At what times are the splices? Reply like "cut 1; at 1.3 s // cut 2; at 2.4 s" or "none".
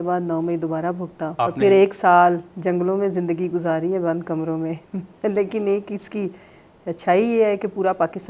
cut 1; at 1.3 s